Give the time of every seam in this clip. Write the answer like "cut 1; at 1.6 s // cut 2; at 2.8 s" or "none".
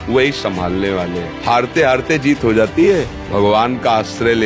cut 1; at 1.3 s // cut 2; at 3.2 s

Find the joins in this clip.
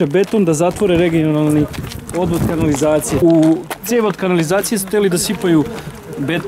cut 1; at 3.2 s

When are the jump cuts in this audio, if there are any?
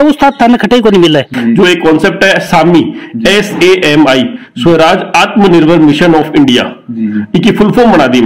cut 1; at 1.3 s

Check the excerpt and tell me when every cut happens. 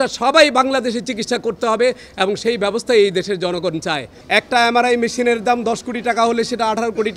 cut 1; at 4.1 s

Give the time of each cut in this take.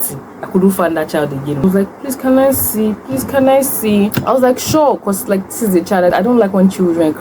cut 1; at 1.6 s // cut 2; at 4.2 s // cut 3; at 6.1 s

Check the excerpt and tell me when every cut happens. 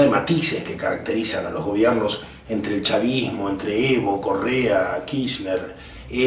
cut 1; at 2.0 s

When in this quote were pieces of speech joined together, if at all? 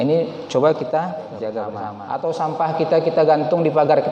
cut 1; at 1.8 s

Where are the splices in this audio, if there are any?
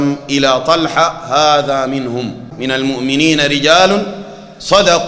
cut 1; at 2.5 s

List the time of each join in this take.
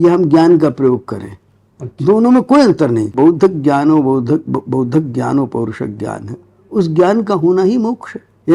cut 1; at 3.1 s

